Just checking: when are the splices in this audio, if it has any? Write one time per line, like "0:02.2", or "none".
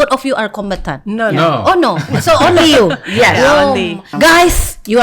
0:04.1